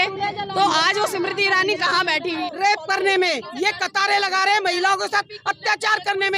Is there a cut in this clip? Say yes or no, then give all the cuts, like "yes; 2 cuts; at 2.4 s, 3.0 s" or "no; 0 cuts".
yes; 1 cut; at 2.4 s